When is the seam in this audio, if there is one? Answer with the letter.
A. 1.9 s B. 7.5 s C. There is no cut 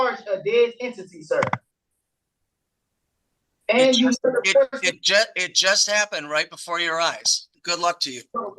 B